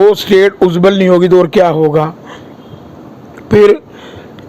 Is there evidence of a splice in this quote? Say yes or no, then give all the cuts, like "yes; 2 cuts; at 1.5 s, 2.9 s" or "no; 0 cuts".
no; 0 cuts